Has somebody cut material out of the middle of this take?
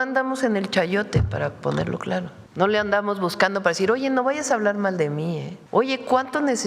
yes; 2 cuts; at 2.4 s, 5.5 s

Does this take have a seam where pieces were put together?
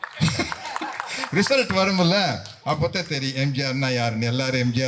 no; 0 cuts

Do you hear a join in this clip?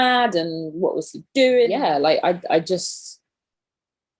yes; 1 cut; at 1.7 s

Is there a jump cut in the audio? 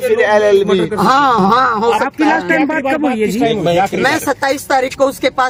no; 0 cuts

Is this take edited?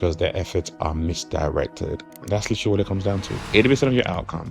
yes; 2 cuts; at 2.1 s, 3.4 s

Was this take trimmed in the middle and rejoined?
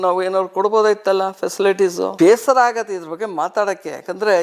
no; 0 cuts

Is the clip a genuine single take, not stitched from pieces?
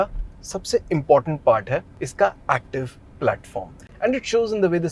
no; 1 cut; at 3.8 s

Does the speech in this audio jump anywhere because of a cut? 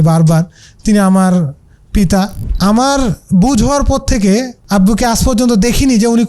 yes; 2 cuts; at 2.4 s, 4.6 s

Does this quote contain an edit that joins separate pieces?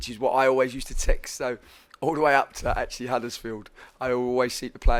no; 0 cuts

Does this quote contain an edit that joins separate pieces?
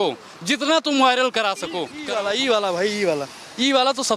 yes; 1 cut; at 1.9 s

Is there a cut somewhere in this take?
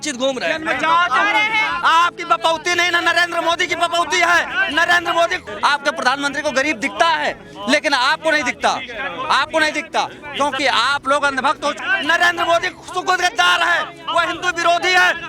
yes; 2 cuts; at 5.5 s, 11.8 s

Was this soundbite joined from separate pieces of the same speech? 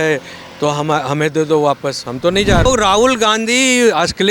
yes; 1 cut; at 2.7 s

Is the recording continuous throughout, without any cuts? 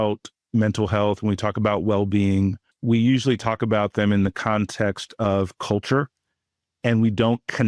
no; 1 cut; at 2.7 s

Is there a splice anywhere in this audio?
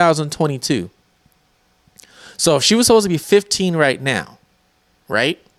no; 0 cuts

